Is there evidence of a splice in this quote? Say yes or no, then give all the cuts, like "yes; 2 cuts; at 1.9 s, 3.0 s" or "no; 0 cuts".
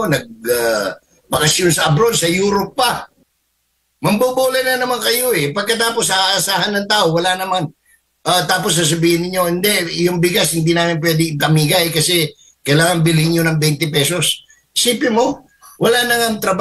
yes; 1 cut; at 3.1 s